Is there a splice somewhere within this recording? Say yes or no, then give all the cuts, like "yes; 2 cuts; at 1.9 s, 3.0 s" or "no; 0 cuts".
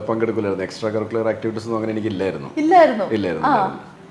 no; 0 cuts